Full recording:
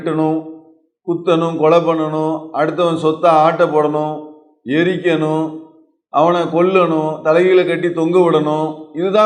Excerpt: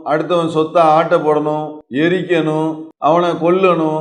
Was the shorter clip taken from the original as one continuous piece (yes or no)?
no